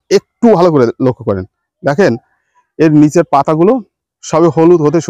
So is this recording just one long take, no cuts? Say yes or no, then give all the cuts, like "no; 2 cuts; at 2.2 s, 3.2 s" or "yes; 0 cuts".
yes; 0 cuts